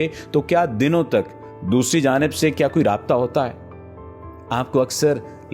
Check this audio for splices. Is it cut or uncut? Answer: uncut